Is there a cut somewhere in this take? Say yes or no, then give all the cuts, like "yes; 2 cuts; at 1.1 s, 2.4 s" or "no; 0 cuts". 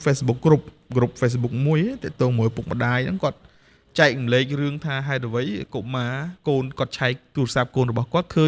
no; 0 cuts